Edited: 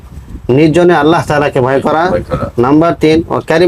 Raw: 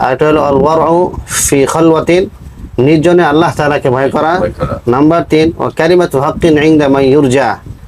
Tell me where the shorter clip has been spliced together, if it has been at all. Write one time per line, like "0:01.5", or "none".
none